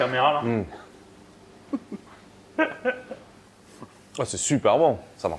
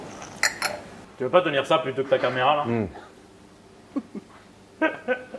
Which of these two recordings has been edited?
second; 1 cut; at 1.0 s

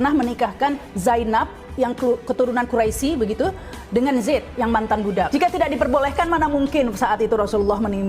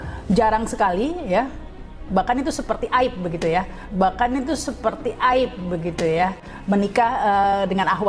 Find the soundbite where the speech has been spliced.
first; 1 cut; at 5.3 s

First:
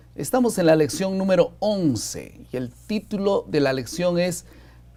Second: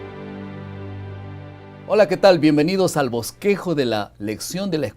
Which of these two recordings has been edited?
second; 1 cut; at 1.8 s

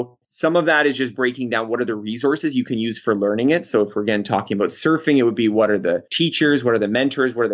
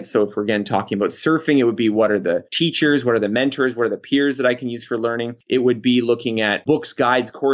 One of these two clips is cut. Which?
second; 2 cuts; at 5.3 s, 6.6 s

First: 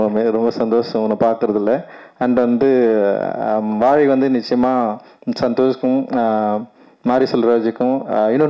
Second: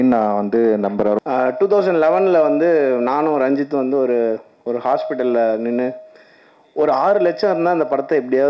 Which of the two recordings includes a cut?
second; 1 cut; at 1.2 s

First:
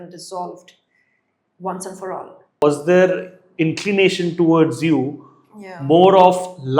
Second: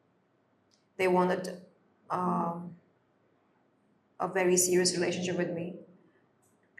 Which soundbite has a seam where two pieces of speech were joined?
first; 1 cut; at 2.6 s

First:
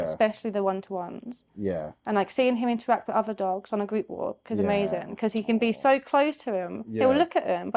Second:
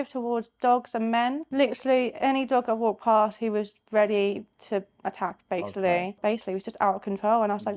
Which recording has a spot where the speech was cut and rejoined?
second; 2 cuts; at 1.4 s, 6.2 s

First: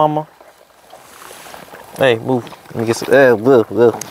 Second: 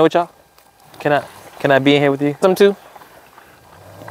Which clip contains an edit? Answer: second; 1 cut; at 2.4 s

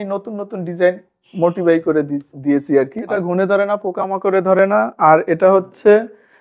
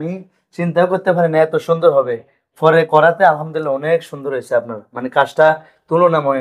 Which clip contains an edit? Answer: first; 1 cut; at 3.1 s

